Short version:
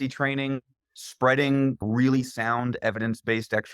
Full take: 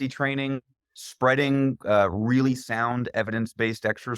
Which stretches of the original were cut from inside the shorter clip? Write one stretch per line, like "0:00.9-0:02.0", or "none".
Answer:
0:01.8-0:02.1